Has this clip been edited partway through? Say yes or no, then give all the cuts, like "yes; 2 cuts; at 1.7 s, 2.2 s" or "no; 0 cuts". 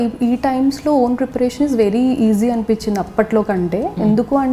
no; 0 cuts